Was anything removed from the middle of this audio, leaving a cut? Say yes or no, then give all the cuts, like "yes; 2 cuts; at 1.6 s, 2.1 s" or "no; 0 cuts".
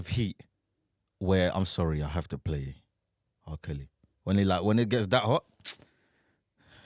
no; 0 cuts